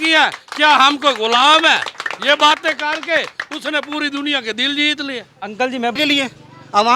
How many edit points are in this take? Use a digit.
1